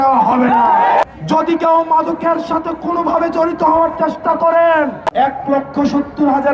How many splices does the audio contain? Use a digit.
2